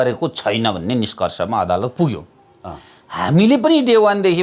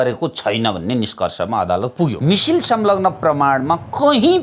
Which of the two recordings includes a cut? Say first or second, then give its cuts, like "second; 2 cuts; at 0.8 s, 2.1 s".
second; 1 cut; at 2.2 s